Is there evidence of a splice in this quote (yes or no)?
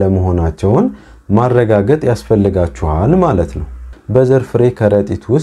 yes